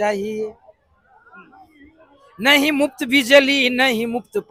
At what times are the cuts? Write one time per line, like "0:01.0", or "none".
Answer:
none